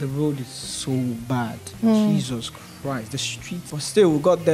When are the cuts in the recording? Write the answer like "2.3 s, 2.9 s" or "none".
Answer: 3.6 s